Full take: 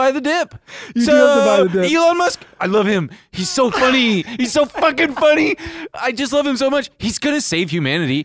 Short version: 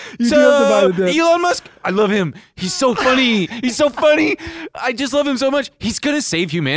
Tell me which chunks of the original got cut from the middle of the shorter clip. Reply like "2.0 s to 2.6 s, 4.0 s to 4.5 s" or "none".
4.7 s to 5.1 s